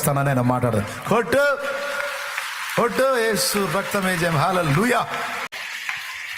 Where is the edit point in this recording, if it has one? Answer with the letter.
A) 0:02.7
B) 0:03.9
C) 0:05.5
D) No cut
C